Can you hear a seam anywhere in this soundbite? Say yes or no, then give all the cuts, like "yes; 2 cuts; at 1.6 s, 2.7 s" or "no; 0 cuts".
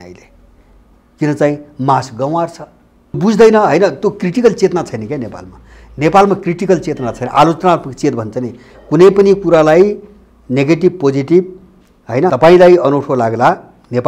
yes; 2 cuts; at 3.2 s, 12.3 s